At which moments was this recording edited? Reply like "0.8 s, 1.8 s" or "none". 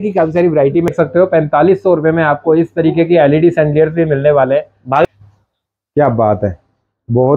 0.9 s, 5.0 s